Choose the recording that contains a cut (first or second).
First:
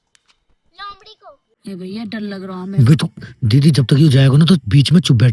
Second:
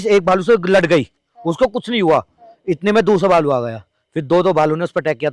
first